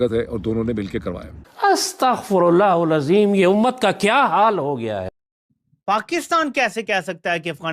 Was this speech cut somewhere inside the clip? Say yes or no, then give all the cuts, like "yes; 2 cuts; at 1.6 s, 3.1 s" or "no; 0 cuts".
yes; 1 cut; at 5.2 s